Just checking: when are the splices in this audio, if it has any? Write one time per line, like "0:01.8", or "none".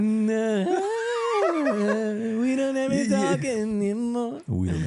none